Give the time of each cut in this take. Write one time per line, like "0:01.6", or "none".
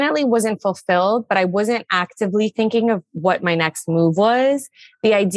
none